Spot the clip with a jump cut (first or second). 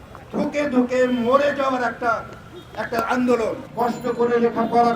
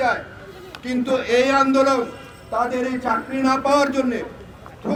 first